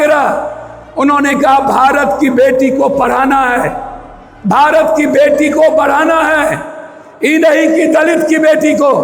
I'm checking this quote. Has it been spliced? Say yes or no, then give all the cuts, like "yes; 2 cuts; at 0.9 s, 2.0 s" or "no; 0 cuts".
no; 0 cuts